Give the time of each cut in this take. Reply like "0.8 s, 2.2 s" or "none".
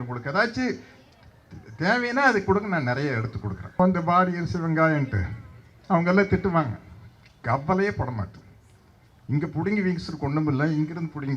3.8 s